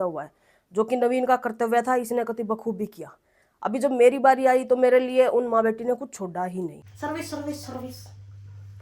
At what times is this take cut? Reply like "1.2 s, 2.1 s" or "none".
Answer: 6.8 s

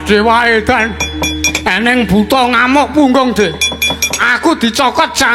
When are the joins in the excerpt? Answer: none

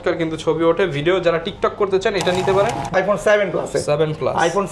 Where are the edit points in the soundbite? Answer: 2.9 s

